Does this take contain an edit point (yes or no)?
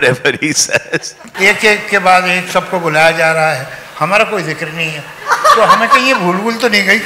yes